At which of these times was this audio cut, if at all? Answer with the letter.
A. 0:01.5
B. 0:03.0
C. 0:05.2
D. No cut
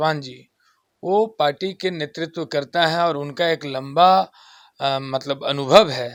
D